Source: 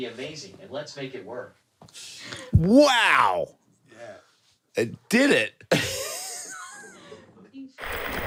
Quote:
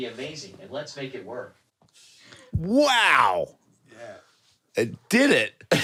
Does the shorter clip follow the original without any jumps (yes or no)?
yes